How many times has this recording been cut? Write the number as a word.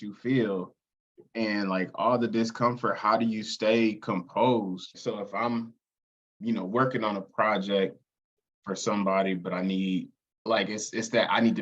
one